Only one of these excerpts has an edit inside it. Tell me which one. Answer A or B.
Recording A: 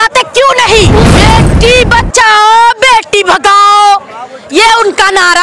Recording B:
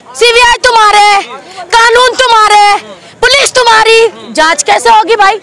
A